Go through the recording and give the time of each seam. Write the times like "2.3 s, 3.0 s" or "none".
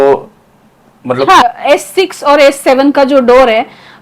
1.5 s